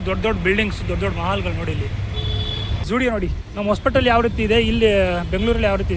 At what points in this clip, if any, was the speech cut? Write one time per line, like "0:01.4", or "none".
0:02.9